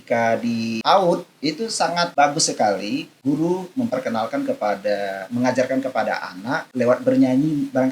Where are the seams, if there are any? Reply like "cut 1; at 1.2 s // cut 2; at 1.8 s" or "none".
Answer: cut 1; at 0.8 s // cut 2; at 2.1 s // cut 3; at 3.1 s // cut 4; at 6.7 s